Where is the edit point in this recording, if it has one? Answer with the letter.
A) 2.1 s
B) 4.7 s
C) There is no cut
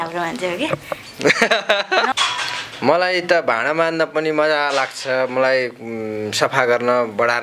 A